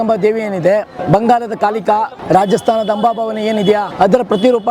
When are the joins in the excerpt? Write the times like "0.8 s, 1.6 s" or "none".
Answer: 1.0 s, 2.2 s, 3.9 s